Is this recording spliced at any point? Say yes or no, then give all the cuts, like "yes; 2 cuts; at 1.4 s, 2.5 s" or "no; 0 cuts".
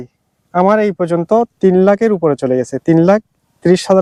no; 0 cuts